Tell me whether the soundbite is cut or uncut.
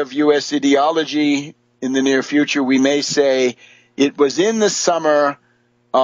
uncut